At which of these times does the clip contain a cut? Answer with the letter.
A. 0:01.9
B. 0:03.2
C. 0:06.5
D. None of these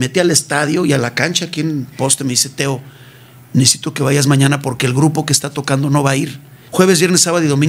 C